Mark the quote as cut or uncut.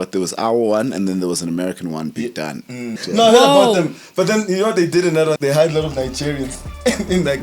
cut